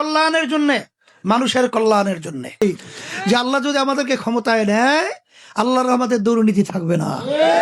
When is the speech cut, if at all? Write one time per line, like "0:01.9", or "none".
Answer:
0:02.6

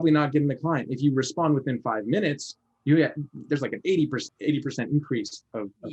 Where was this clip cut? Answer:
0:04.2

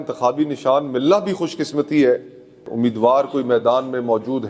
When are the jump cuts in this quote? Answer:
0:02.7

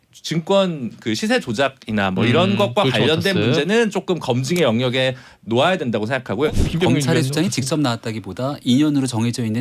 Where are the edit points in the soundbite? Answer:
0:06.5

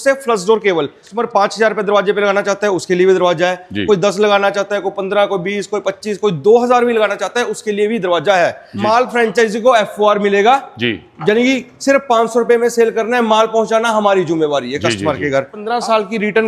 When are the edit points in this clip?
0:01.2
0:08.7
0:15.6

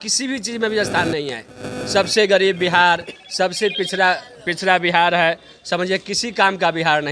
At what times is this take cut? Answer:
none

